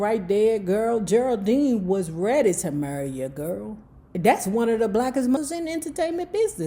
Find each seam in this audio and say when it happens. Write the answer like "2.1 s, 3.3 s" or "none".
5.4 s

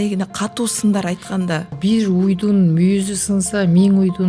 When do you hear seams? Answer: 1.7 s

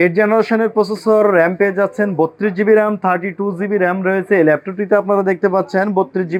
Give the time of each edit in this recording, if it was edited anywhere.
none

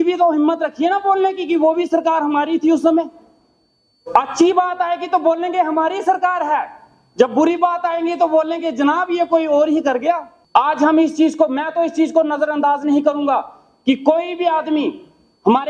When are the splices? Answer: 10.3 s

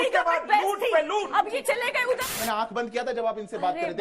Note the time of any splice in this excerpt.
2.0 s

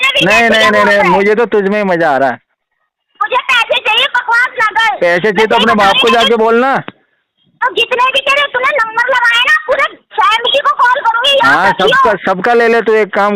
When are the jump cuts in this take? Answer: none

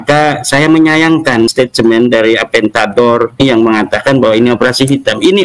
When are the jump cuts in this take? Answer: 1.5 s, 3.4 s

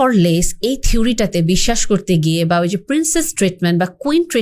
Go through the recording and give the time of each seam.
none

